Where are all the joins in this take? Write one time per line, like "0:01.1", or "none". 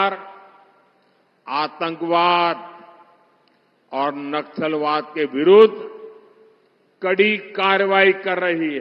none